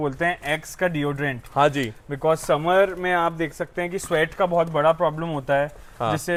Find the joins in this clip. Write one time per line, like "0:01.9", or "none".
none